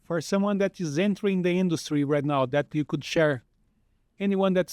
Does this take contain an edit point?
no; 0 cuts

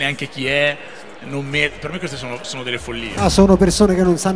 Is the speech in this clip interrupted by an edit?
yes; 1 cut; at 3.2 s

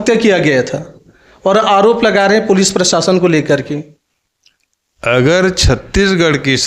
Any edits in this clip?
no; 0 cuts

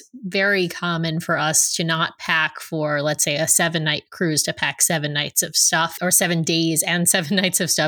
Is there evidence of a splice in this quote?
yes; 1 cut; at 5.9 s

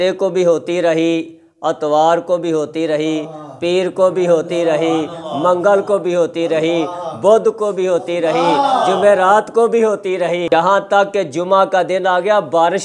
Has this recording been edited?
no; 0 cuts

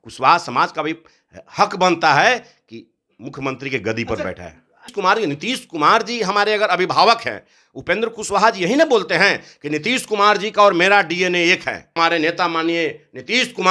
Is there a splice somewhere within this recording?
yes; 2 cuts; at 4.9 s, 12.0 s

